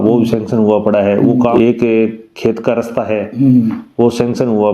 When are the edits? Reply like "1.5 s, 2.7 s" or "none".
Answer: 1.5 s